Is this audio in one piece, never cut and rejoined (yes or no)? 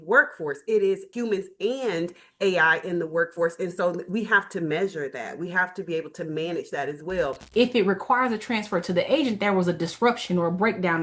no